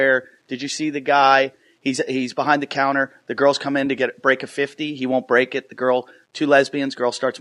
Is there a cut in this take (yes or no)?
yes